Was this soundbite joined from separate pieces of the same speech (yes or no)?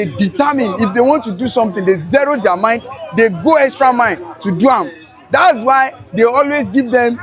no